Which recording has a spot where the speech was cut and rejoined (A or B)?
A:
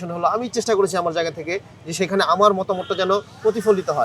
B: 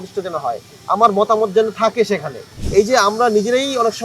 B